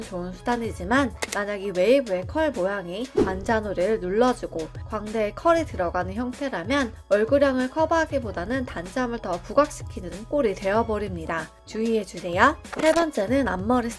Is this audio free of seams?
no; 1 cut; at 12.7 s

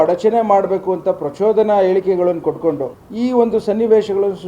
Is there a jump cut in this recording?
yes; 1 cut; at 3.0 s

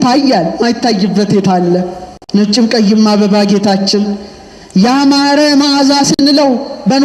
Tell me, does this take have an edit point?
no; 0 cuts

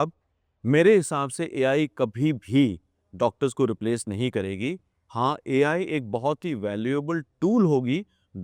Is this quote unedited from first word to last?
yes; 0 cuts

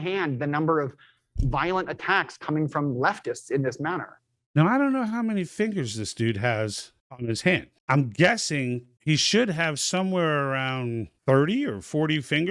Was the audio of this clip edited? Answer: no; 0 cuts

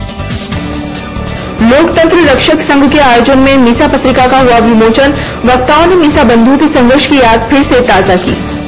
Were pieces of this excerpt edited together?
no; 0 cuts

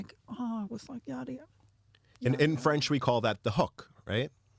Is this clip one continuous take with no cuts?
yes; 0 cuts

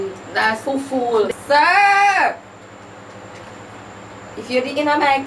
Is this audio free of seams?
no; 1 cut; at 1.3 s

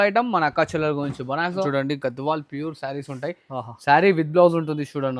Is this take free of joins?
no; 1 cut; at 1.7 s

